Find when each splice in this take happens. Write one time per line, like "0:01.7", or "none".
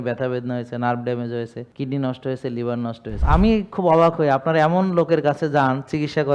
0:01.6
0:03.1